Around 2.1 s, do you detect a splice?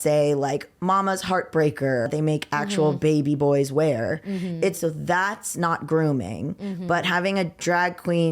yes; 2 cuts; at 2.1 s, 4.8 s

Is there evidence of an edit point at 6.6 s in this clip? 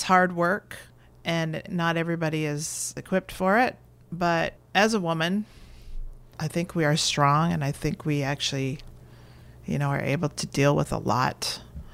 no; 2 cuts; at 1.7 s, 4.6 s

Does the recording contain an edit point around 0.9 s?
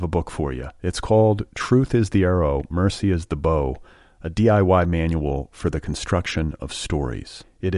no; 0 cuts

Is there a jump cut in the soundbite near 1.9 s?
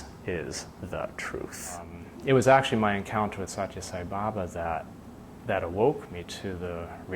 yes; 1 cut; at 1.9 s

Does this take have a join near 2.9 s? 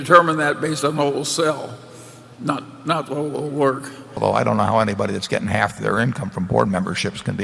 no; 1 cut; at 4.2 s

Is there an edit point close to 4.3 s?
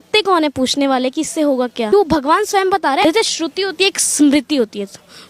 no; 2 cuts; at 1.9 s, 3.0 s

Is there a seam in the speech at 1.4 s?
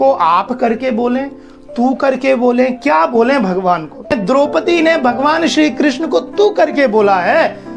no; 1 cut; at 4.2 s

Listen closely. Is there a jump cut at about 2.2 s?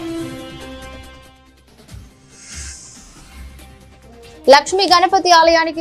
yes; 1 cut; at 2.2 s

